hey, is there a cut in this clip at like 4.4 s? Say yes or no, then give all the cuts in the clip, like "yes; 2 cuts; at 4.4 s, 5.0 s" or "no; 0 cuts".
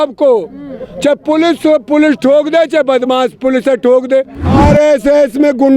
yes; 1 cut; at 4.4 s